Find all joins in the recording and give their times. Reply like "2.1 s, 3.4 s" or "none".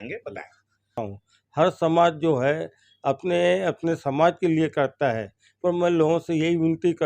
0.9 s

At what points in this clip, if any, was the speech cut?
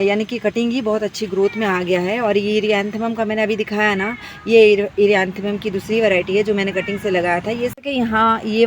7.7 s

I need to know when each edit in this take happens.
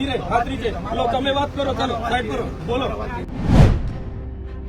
3.3 s

